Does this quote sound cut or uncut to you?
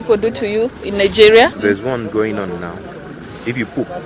cut